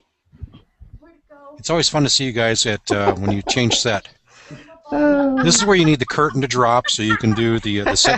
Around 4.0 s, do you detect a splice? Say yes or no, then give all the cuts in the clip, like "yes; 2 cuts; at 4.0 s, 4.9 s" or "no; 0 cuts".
no; 0 cuts